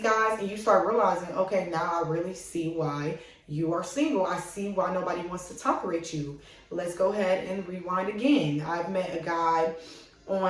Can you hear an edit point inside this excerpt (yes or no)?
no